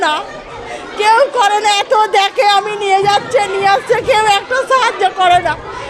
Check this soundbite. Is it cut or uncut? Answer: uncut